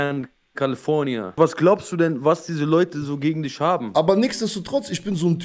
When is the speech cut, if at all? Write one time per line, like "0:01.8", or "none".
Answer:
0:01.4
0:03.9